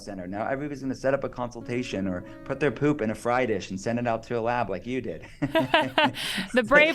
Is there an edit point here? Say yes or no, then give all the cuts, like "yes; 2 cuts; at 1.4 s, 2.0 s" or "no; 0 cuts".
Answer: no; 0 cuts